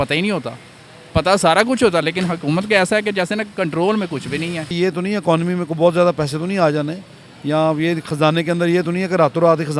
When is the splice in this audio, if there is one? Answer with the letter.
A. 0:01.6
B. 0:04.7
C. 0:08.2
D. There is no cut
B